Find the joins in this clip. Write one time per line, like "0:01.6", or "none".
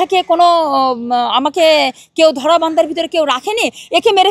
none